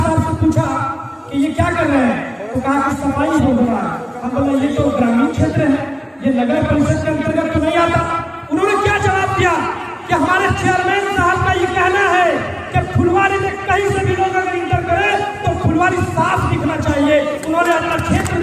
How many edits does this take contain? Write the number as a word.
zero